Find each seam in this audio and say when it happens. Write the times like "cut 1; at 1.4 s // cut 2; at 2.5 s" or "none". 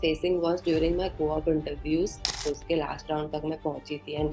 cut 1; at 2.3 s